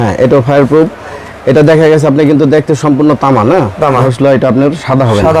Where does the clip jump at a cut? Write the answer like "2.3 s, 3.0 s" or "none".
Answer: 4.0 s

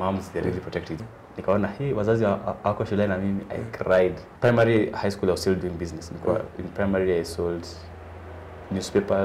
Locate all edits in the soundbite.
0.9 s, 4.3 s

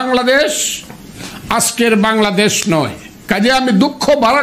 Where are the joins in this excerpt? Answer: 3.1 s

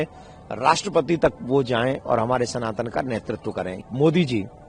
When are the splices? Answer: 3.8 s

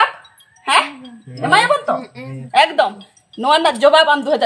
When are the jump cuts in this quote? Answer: none

